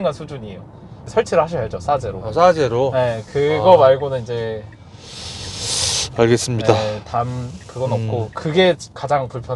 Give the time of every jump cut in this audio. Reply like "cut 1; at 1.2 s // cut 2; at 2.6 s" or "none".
cut 1; at 1.0 s